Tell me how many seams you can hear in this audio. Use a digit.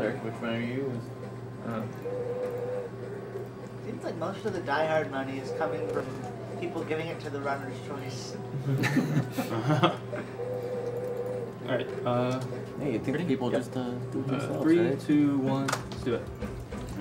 1